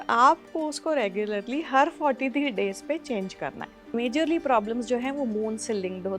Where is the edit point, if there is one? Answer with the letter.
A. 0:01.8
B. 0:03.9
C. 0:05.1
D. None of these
B